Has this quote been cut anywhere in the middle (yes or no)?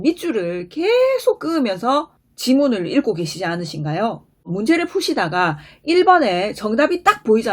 yes